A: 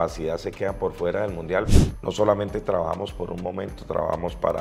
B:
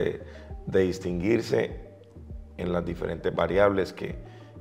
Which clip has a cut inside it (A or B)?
A